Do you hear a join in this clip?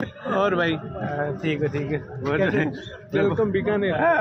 no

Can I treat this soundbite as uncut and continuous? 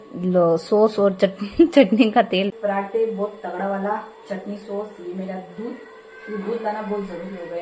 no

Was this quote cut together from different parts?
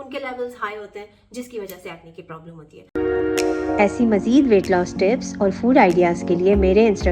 yes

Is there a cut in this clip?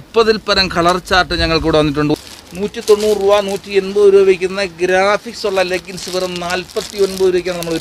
yes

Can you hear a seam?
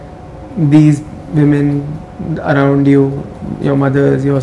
no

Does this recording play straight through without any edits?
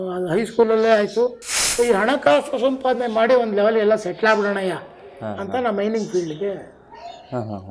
no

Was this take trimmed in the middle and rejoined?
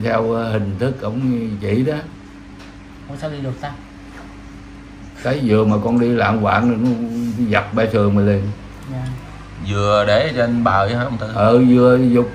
no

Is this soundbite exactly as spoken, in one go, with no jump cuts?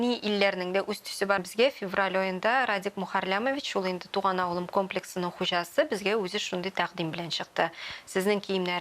no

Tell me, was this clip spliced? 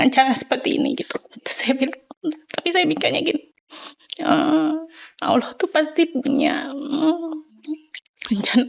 no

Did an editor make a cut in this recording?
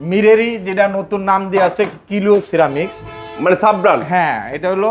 no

